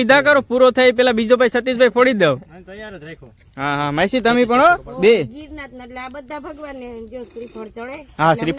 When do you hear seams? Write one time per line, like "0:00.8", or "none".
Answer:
none